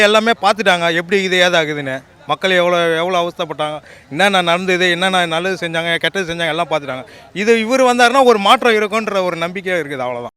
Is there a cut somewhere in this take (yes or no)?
no